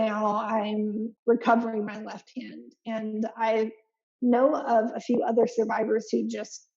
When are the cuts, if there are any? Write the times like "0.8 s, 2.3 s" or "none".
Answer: 1.1 s